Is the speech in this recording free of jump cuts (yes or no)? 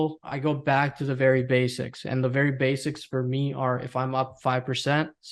yes